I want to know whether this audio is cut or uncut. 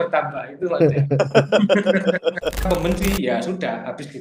cut